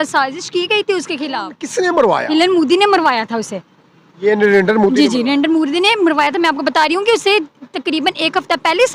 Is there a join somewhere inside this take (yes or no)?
yes